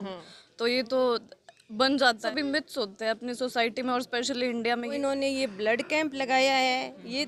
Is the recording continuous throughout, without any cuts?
no; 2 cuts; at 2.2 s, 5.0 s

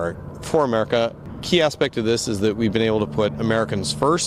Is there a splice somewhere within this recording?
yes; 1 cut; at 1.2 s

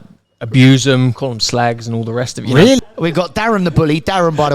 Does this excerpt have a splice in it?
yes; 1 cut; at 2.8 s

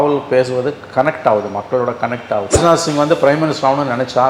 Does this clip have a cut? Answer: yes; 1 cut; at 2.6 s

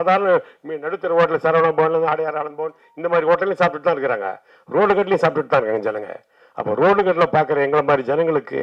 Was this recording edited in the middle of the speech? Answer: no; 0 cuts

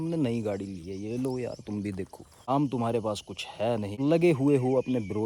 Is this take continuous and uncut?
no; 2 cuts; at 2.5 s, 3.9 s

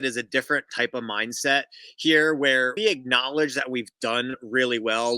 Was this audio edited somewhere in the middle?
yes; 1 cut; at 2.8 s

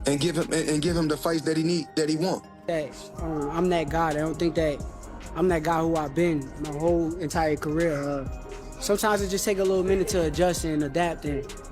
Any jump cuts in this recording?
yes; 1 cut; at 2.7 s

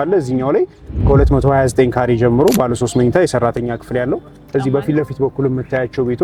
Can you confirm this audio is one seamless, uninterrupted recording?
yes; 0 cuts

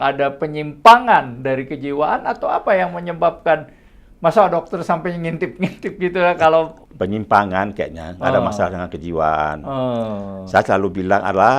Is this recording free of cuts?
no; 1 cut; at 6.8 s

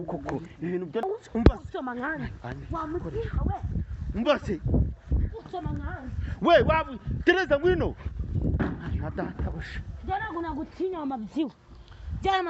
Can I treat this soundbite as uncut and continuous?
no; 1 cut; at 1.0 s

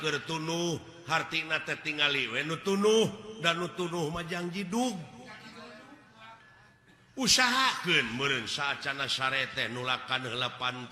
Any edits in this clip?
no; 0 cuts

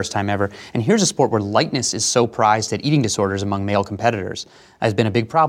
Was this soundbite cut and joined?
no; 0 cuts

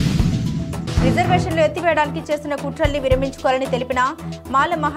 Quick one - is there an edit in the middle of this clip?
yes; 1 cut; at 1.0 s

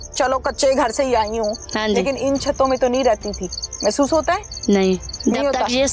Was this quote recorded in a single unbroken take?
yes; 0 cuts

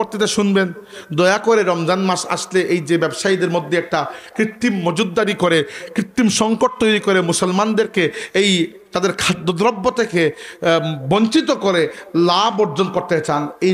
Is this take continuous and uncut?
yes; 0 cuts

